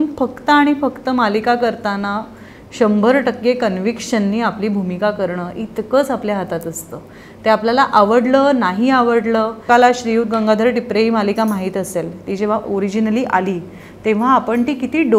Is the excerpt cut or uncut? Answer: cut